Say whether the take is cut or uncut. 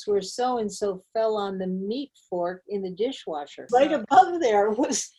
cut